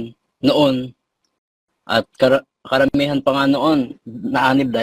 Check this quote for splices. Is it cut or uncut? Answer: uncut